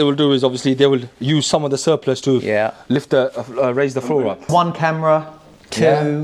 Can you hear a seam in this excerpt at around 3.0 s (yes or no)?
no